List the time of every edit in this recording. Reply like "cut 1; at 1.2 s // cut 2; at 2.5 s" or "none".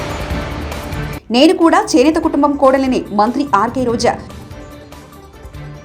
none